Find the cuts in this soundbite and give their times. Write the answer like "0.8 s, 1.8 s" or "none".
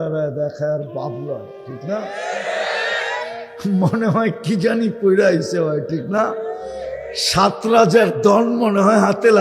none

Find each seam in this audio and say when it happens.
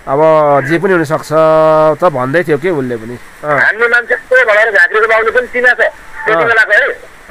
3.3 s

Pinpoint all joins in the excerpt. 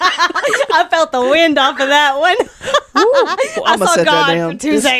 none

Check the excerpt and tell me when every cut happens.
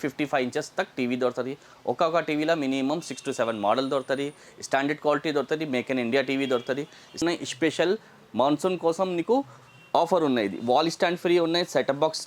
7.2 s

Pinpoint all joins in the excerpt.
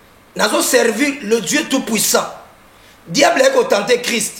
none

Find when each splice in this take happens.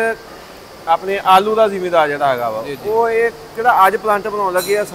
none

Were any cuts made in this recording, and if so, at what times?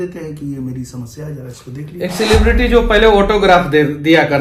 none

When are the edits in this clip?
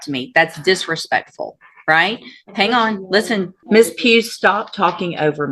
3.6 s

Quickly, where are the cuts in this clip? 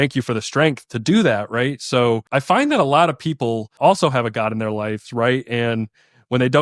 2.2 s, 3.7 s

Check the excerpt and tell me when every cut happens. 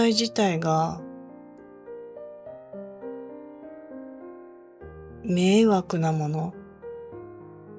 1.0 s, 5.2 s

